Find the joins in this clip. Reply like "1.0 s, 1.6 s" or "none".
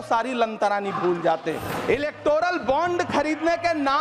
1.7 s